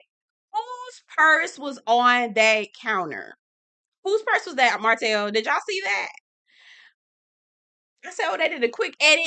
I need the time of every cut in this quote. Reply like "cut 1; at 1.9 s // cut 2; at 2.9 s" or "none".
none